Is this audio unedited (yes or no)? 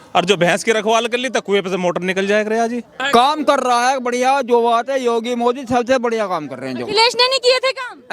no